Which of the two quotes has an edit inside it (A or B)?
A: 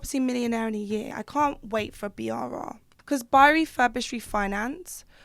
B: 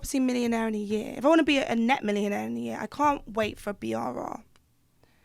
A